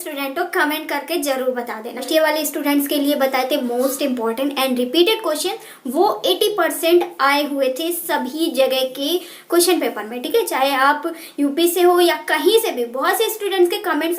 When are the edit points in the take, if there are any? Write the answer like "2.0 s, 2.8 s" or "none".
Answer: 2.1 s